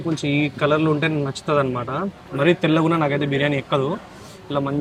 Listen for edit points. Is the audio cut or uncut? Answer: uncut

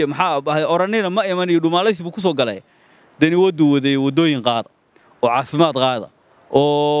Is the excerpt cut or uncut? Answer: uncut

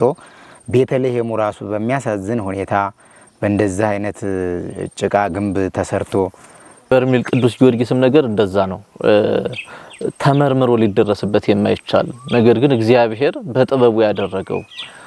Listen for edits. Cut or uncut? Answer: cut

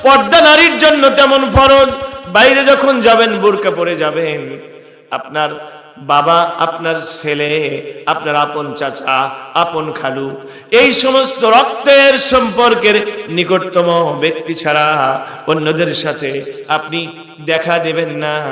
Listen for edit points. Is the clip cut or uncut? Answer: uncut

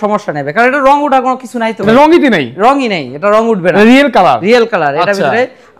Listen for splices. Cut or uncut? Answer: uncut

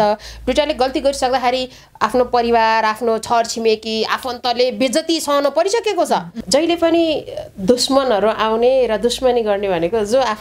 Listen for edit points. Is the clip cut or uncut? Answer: cut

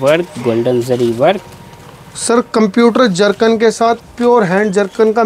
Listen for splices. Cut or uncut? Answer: uncut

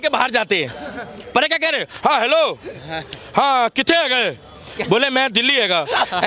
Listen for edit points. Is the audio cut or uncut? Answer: uncut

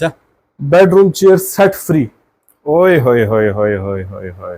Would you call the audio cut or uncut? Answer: uncut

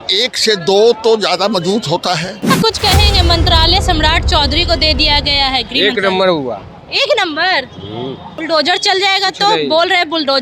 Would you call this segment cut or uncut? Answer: cut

